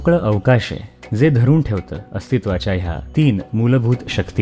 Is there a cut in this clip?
yes; 1 cut; at 3.0 s

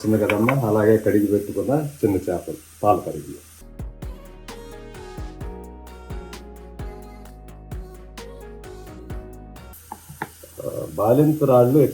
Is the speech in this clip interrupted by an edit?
yes; 1 cut; at 9.7 s

